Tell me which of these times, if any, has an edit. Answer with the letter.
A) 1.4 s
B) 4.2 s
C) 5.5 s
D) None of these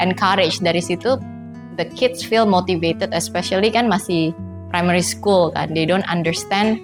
D